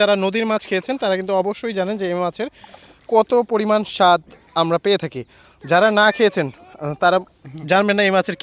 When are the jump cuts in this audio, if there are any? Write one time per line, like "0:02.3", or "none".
none